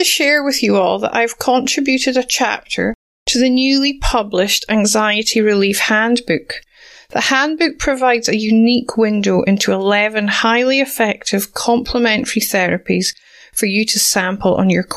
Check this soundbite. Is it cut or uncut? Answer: uncut